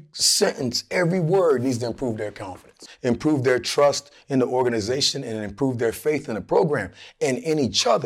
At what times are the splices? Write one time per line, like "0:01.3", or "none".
0:02.8